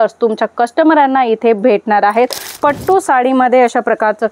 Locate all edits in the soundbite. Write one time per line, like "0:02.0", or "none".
0:02.5